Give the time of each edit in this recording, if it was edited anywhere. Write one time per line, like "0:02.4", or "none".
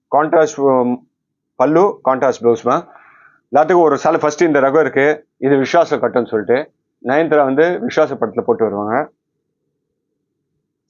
none